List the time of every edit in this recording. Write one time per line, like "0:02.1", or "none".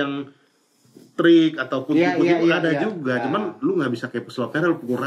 none